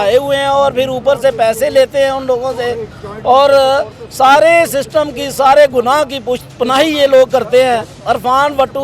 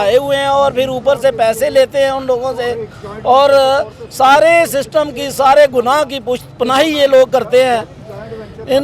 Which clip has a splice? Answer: first; 1 cut; at 7.9 s

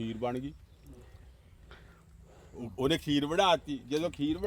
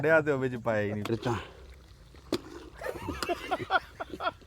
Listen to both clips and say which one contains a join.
second; 1 cut; at 1.1 s

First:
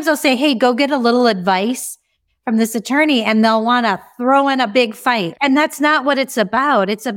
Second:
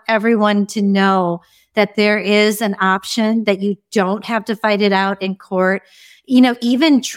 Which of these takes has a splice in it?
first; 1 cut; at 5.3 s

